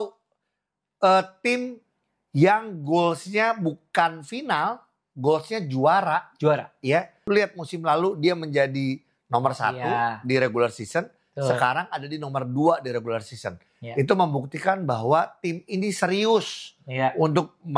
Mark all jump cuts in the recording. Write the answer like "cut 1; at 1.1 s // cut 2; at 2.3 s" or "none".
cut 1; at 7.1 s